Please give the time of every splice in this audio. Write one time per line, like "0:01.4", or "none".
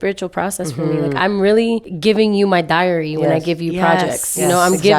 0:01.9